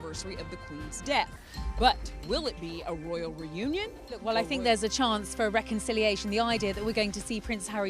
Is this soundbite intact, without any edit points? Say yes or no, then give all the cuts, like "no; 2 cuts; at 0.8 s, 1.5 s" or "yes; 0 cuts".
no; 1 cut; at 4.2 s